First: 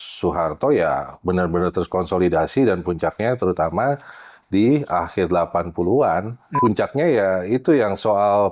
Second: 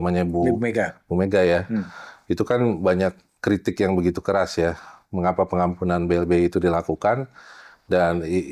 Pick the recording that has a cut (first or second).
first